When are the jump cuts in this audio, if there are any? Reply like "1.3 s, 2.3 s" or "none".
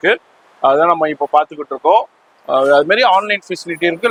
none